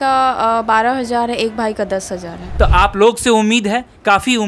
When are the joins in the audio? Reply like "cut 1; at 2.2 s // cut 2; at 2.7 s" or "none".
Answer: cut 1; at 2.4 s